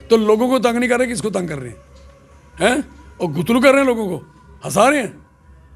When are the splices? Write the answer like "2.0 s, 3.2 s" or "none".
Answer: none